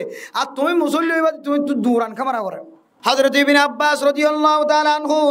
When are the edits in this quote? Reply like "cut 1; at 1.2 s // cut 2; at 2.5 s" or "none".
cut 1; at 2.9 s